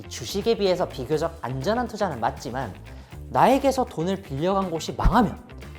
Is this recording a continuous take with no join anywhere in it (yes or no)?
yes